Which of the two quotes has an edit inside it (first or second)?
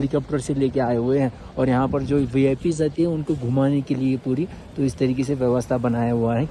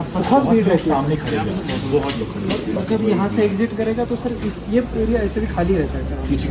second